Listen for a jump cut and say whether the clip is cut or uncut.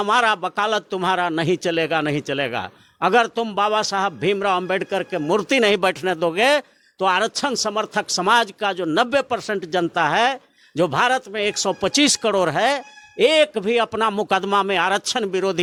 uncut